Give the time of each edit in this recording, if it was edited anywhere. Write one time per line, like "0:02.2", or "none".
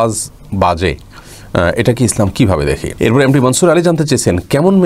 0:02.9